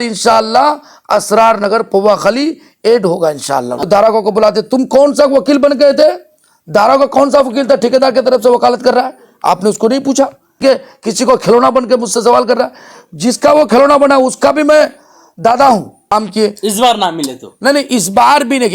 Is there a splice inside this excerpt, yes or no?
yes